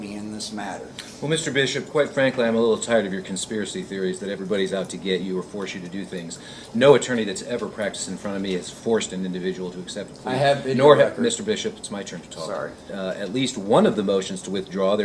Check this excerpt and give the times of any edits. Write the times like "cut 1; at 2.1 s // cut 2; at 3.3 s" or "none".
cut 1; at 12.9 s